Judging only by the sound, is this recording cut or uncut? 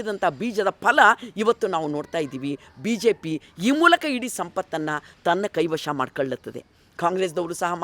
uncut